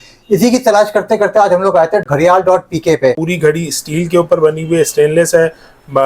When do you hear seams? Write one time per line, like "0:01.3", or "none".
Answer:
0:02.1
0:03.2